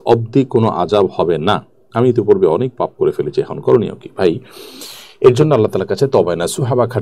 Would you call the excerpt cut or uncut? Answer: uncut